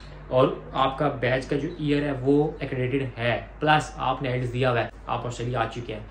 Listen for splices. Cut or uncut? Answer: cut